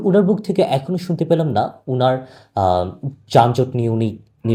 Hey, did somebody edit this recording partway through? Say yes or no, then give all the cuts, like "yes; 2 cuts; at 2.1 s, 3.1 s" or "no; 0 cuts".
no; 0 cuts